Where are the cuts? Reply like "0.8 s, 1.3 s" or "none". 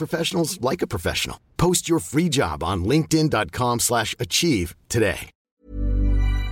5.6 s